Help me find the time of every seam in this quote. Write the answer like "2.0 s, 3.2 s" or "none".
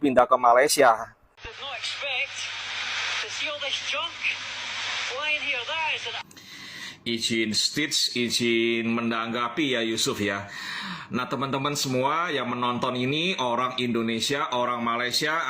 1.2 s